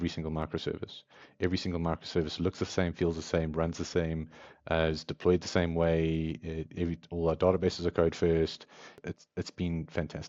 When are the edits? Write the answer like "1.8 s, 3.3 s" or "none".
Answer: 9.0 s